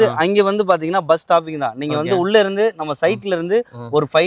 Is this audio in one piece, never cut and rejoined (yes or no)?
yes